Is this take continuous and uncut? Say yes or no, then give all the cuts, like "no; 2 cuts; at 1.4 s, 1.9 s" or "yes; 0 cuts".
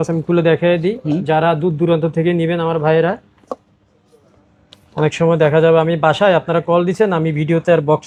yes; 0 cuts